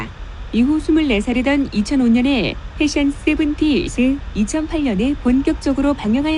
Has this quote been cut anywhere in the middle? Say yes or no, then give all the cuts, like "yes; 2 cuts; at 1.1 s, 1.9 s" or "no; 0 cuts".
yes; 1 cut; at 1.3 s